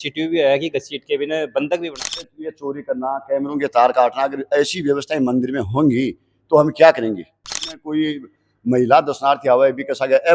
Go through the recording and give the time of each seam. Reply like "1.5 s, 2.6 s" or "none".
2.2 s, 7.5 s